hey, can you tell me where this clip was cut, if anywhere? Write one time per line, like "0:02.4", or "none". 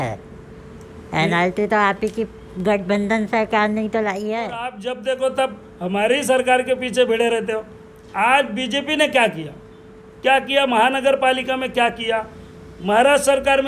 0:04.8